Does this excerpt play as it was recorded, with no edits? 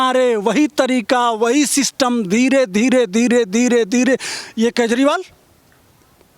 yes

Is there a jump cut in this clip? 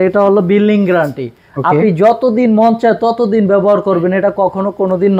no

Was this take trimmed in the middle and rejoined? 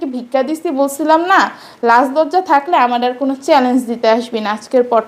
no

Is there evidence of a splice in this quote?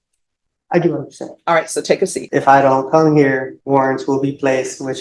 yes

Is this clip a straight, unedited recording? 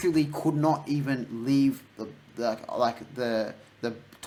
yes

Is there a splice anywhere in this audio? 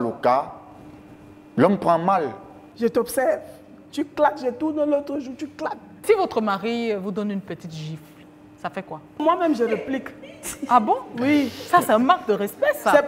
yes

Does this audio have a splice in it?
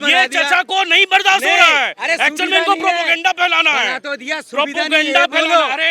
no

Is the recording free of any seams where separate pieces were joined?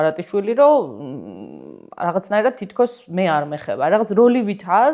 yes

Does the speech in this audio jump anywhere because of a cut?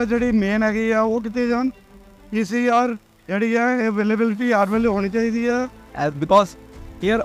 yes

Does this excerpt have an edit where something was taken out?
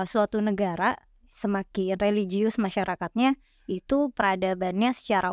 no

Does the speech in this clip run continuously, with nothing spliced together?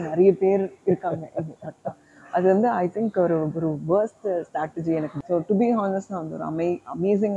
no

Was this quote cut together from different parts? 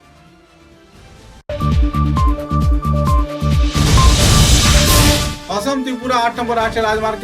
yes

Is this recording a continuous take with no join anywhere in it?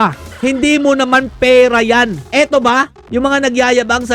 no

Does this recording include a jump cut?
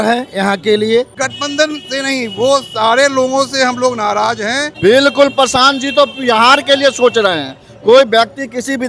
yes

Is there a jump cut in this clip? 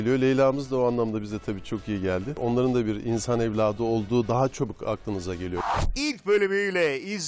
yes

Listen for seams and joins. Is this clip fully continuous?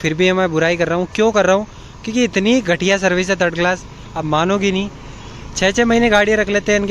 no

